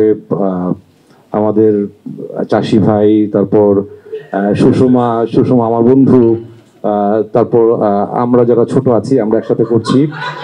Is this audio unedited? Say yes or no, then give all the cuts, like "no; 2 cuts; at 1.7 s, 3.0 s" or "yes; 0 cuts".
yes; 0 cuts